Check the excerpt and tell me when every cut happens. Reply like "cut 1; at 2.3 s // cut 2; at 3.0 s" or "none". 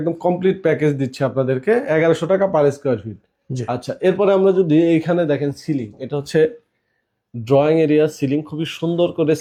none